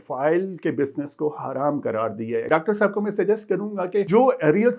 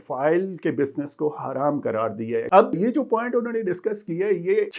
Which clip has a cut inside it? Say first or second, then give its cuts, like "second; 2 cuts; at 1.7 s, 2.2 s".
first; 1 cut; at 2.5 s